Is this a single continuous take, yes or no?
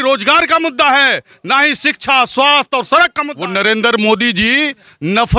no